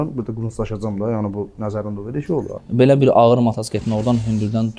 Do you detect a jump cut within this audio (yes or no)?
yes